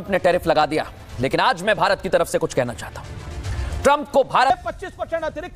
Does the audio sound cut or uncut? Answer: cut